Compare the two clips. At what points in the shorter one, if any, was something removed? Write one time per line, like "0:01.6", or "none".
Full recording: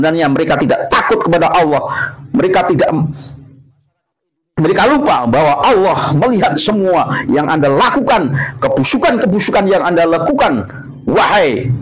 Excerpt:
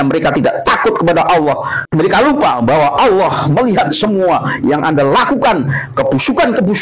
0:01.8